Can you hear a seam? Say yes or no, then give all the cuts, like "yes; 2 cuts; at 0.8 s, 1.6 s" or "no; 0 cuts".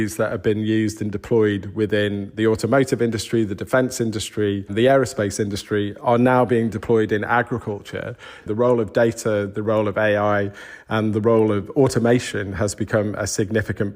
yes; 2 cuts; at 4.7 s, 8.5 s